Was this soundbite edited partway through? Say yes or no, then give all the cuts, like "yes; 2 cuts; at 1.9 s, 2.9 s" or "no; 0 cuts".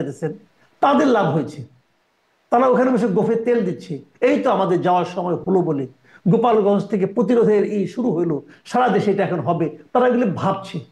no; 0 cuts